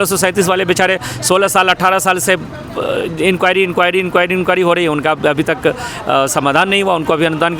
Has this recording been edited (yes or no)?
no